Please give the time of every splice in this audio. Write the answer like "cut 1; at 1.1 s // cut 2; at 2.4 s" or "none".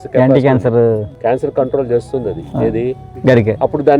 cut 1; at 1.1 s // cut 2; at 3.1 s

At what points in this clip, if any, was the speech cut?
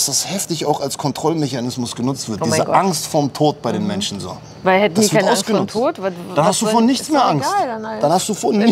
none

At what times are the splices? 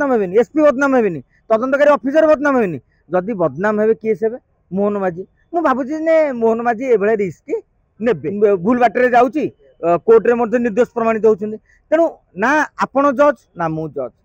cut 1; at 8.3 s

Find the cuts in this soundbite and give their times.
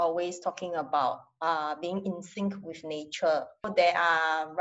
cut 1; at 3.7 s

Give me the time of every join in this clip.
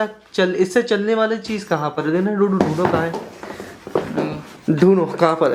cut 1; at 4.5 s

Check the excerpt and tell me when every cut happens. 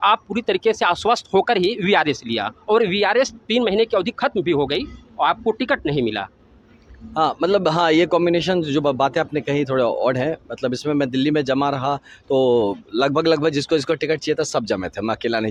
none

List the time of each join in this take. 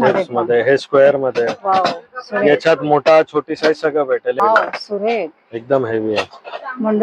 cut 1; at 4.4 s

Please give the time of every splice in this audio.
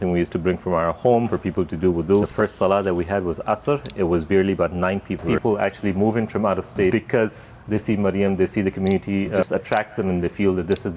cut 1; at 1.3 s // cut 2; at 2.3 s // cut 3; at 5.3 s // cut 4; at 6.9 s // cut 5; at 9.4 s

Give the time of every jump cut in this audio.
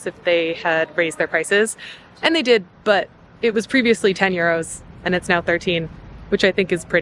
none

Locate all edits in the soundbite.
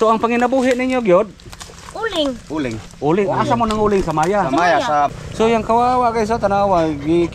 cut 1; at 5.1 s

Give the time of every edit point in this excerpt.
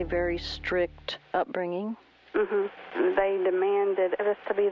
cut 1; at 2.8 s

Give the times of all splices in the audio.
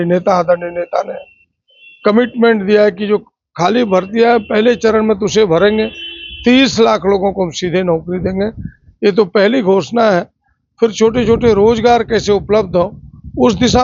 none

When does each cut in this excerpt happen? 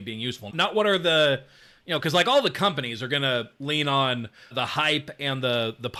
none

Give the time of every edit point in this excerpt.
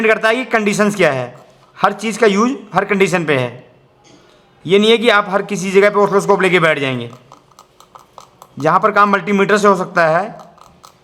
none

